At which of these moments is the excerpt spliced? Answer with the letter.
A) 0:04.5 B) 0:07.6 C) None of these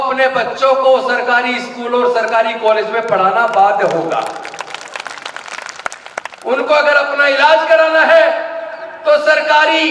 C